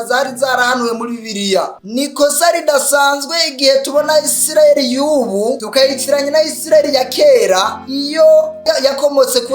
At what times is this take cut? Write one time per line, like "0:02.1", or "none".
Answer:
0:01.7